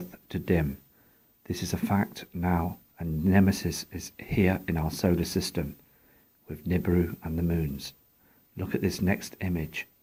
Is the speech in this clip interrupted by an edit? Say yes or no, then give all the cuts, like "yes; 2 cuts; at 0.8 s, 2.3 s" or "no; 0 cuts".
no; 0 cuts